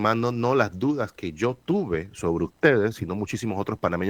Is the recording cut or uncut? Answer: uncut